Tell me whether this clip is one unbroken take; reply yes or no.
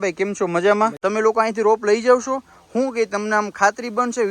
no